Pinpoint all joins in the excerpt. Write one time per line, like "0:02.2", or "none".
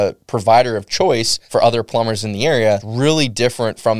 0:01.4
0:02.9